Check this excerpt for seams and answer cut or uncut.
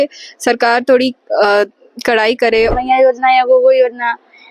cut